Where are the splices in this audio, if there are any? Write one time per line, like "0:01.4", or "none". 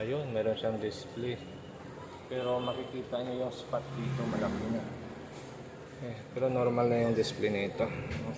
none